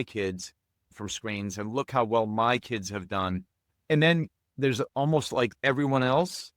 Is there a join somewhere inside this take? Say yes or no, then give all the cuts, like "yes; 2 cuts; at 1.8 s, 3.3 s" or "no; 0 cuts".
yes; 4 cuts; at 0.9 s, 3.8 s, 4.4 s, 5.5 s